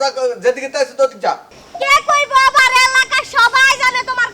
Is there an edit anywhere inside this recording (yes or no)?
yes